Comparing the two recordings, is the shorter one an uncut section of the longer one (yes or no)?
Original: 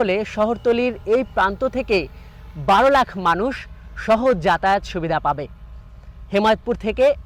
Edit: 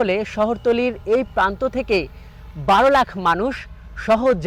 yes